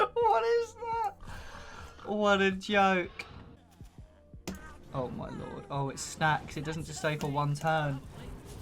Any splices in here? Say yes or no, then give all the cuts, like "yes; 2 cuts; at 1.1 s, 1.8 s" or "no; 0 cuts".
yes; 1 cut; at 3.6 s